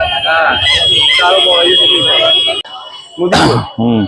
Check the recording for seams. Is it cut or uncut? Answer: cut